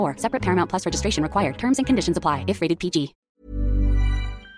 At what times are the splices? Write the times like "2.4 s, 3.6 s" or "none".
3.2 s